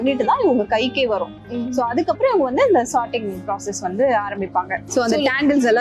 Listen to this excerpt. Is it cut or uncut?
uncut